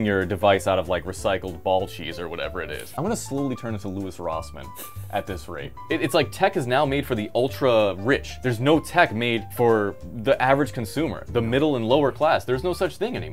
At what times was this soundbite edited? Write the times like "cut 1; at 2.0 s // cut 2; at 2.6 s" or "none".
cut 1; at 2.8 s // cut 2; at 5.7 s // cut 3; at 8.4 s // cut 4; at 9.7 s